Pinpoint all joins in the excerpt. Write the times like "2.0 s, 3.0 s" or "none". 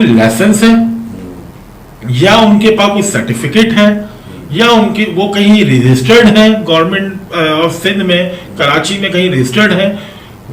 none